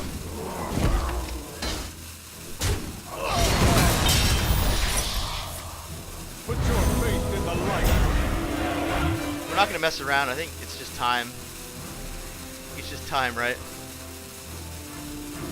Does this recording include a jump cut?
yes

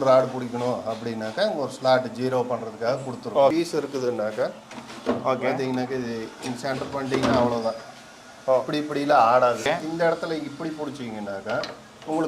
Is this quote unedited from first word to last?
no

